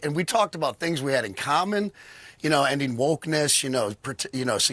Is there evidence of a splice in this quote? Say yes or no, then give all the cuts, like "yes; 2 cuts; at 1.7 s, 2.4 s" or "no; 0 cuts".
yes; 1 cut; at 3.6 s